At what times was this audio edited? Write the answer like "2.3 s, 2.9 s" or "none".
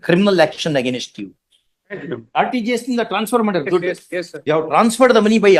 2.1 s, 4.3 s